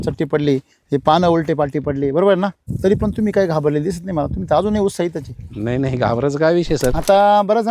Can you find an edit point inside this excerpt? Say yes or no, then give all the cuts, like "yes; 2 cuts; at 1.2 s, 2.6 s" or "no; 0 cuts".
yes; 2 cuts; at 2.7 s, 6.9 s